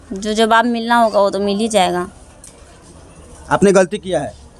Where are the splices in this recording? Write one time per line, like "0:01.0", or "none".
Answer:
none